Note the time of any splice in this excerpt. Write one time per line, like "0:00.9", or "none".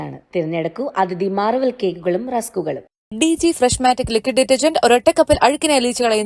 none